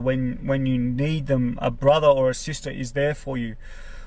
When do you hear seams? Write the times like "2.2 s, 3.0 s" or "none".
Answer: none